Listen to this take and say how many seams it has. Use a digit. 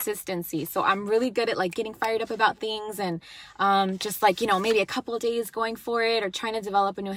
0